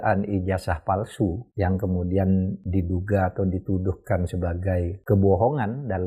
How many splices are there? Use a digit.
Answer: 3